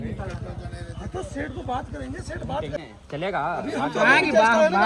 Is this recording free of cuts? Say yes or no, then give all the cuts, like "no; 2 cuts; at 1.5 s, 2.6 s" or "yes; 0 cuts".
no; 1 cut; at 2.8 s